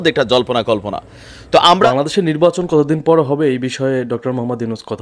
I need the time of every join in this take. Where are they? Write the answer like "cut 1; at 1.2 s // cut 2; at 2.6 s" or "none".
cut 1; at 1.9 s

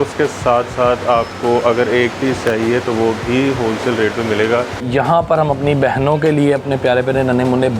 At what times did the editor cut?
cut 1; at 4.8 s

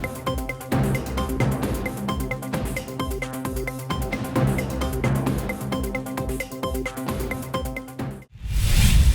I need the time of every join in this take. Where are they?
cut 1; at 8.2 s

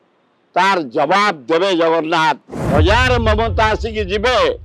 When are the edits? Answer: cut 1; at 2.5 s

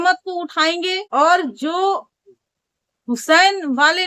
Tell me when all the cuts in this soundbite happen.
cut 1; at 1.0 s

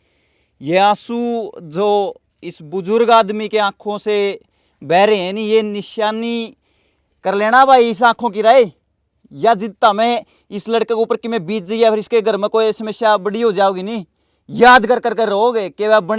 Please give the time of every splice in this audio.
none

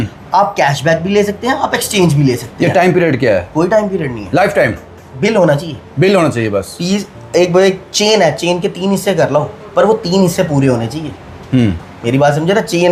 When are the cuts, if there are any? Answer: none

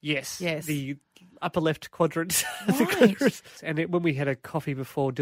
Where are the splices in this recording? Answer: cut 1; at 3.5 s

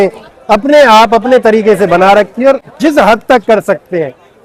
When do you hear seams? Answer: none

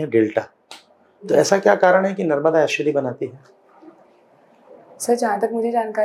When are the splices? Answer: none

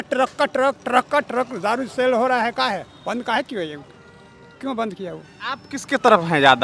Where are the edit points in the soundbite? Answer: cut 1; at 5.7 s

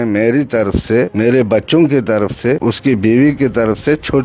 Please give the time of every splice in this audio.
cut 1; at 1.1 s // cut 2; at 2.6 s

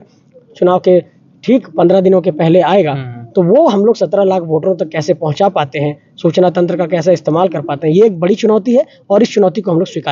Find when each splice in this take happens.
none

